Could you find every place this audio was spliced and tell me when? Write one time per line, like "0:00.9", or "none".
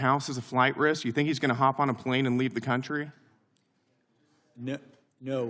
none